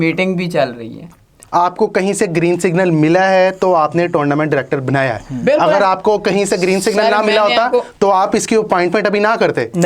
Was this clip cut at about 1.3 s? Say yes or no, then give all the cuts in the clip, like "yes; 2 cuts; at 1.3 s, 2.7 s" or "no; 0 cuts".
yes; 1 cut; at 1.3 s